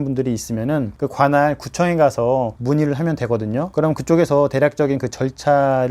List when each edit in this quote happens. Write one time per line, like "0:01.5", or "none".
0:00.9

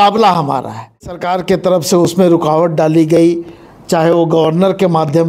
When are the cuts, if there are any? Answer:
0:01.2

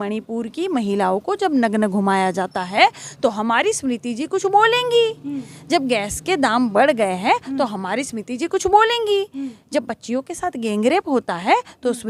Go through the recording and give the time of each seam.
none

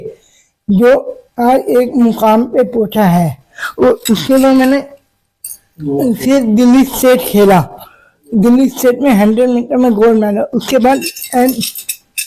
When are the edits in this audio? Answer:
none

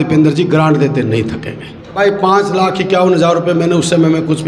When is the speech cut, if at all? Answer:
0:01.9

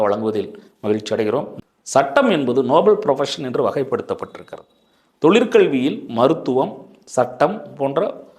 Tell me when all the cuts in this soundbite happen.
0:01.5

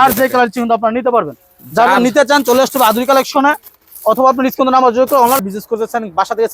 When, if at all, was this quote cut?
0:05.4

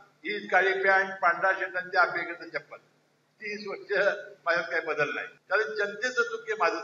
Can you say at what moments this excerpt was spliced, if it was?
0:05.3

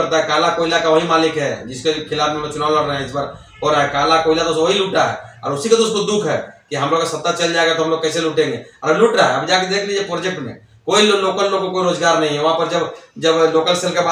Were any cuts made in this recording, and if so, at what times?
none

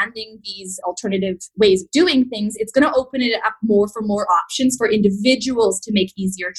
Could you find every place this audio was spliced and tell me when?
none

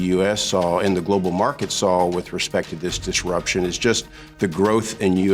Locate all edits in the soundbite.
none

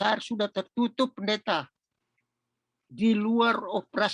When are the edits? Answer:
none

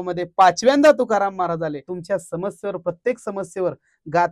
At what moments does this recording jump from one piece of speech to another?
0:01.9

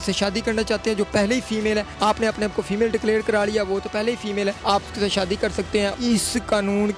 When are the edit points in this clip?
0:01.9
0:04.6
0:05.9

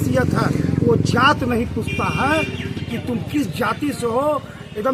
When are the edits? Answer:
none

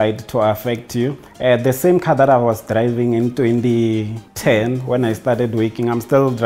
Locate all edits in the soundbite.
0:01.2
0:04.2

